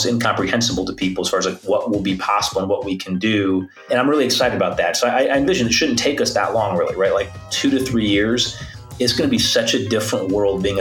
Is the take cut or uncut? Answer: cut